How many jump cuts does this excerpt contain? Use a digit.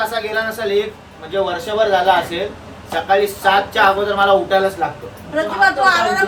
0